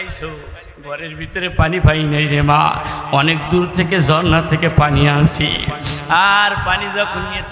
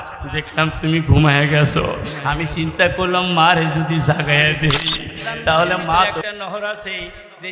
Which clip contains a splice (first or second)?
second